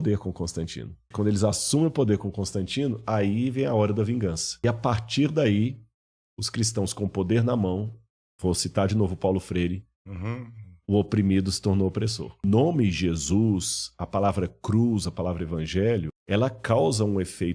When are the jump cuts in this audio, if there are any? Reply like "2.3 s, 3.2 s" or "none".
1.1 s, 4.6 s, 12.4 s, 16.2 s